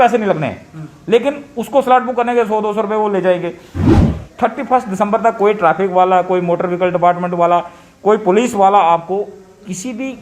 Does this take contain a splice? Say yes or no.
yes